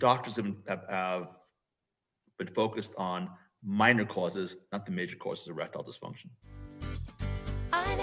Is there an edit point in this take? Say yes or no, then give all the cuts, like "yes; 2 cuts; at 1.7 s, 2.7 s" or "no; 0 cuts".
yes; 1 cut; at 6.7 s